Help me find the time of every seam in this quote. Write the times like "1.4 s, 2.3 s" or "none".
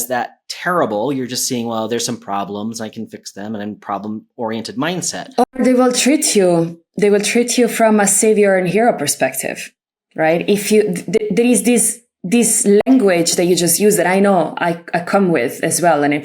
5.2 s